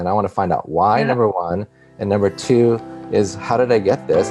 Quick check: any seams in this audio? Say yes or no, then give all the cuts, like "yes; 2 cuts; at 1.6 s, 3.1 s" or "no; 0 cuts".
no; 0 cuts